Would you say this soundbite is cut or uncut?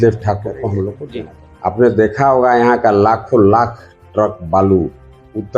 cut